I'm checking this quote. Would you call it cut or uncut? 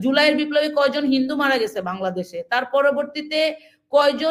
uncut